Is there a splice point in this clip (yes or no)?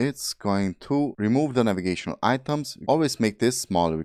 no